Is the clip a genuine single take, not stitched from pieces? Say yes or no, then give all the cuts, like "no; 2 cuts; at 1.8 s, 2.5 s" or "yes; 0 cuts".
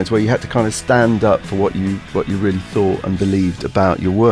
yes; 0 cuts